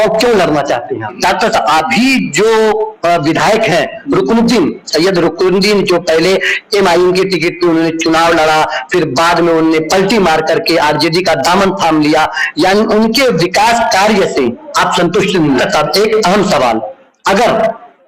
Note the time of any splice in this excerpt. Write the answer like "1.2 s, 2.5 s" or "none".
1.2 s, 15.6 s